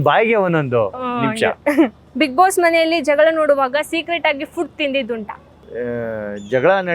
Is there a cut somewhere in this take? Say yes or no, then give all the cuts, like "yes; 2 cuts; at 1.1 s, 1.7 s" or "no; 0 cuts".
no; 0 cuts